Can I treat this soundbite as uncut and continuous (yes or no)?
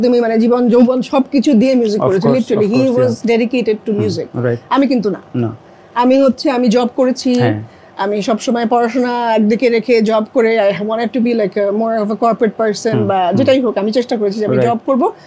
yes